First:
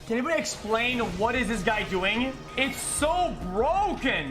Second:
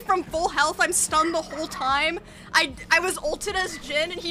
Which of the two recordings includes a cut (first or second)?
first